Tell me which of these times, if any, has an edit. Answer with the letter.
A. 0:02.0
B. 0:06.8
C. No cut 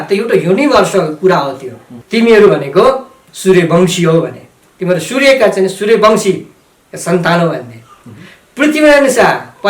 A